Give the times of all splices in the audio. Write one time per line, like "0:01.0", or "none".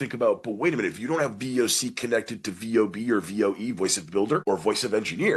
0:04.4